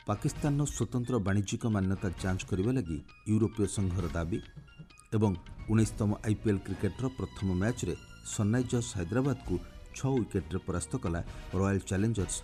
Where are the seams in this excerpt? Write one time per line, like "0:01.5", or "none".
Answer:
none